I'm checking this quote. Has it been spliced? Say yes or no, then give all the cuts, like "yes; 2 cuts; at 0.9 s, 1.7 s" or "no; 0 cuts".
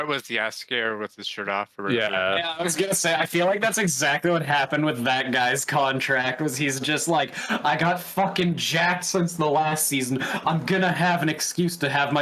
no; 0 cuts